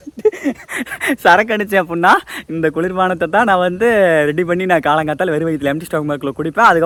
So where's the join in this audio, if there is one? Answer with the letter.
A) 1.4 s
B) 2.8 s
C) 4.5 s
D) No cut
D